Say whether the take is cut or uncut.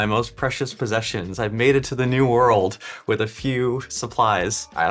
uncut